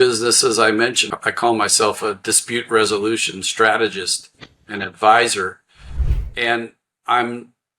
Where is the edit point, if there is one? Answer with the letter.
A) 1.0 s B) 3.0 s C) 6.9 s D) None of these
A